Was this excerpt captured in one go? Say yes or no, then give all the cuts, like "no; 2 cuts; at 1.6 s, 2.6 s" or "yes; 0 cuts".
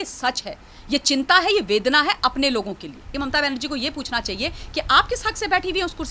no; 1 cut; at 3.0 s